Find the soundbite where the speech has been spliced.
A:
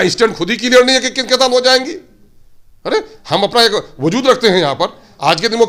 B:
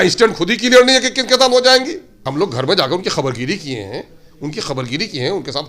B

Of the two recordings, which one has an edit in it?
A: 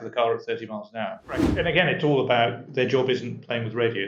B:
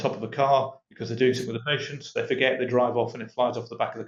A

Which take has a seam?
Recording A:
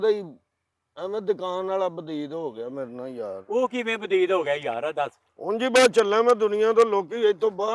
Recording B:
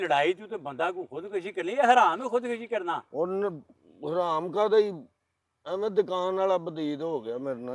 A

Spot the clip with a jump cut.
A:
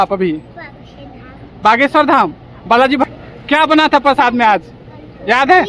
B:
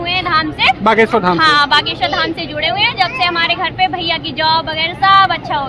A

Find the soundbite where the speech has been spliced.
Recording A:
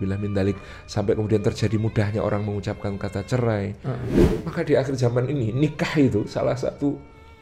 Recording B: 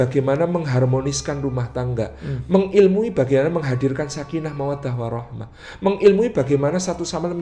A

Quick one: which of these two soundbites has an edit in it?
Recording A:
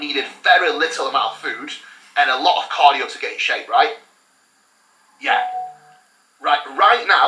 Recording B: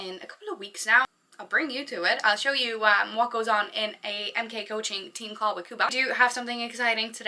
B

